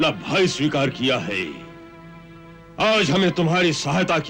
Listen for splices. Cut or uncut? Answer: uncut